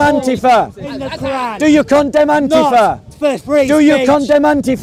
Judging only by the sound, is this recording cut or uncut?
uncut